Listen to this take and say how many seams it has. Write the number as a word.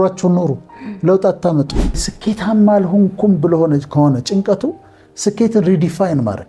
one